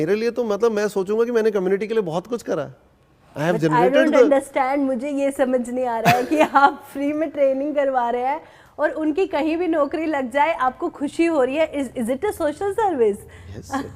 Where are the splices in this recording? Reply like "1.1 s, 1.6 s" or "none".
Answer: none